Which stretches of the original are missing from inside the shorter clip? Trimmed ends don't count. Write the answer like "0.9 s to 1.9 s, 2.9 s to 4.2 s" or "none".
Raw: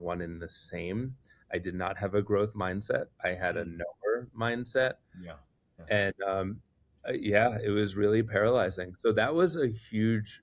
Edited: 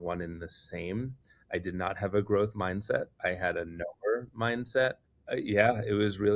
5.1 s to 6.9 s